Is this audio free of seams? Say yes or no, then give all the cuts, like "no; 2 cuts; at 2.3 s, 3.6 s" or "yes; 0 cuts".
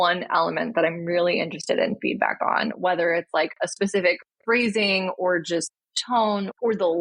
yes; 0 cuts